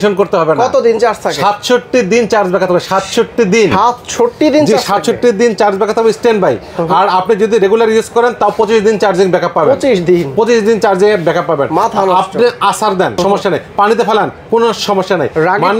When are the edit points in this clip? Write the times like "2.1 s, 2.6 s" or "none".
none